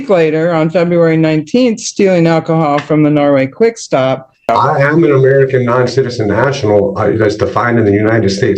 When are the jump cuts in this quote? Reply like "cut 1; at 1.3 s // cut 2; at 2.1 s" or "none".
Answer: cut 1; at 4.5 s